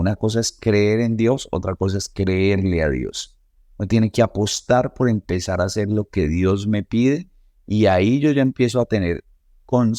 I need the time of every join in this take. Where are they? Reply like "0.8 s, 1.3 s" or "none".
none